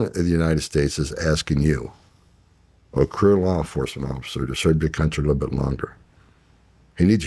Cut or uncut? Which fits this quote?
uncut